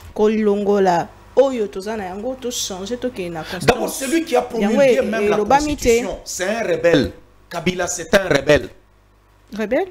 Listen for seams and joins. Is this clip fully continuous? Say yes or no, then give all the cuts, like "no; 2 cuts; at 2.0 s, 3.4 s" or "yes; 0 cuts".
yes; 0 cuts